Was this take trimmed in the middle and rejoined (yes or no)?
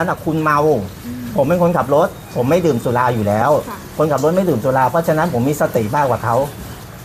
no